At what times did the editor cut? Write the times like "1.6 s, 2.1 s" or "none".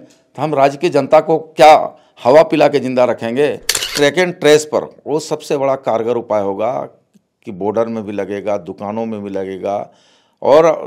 3.9 s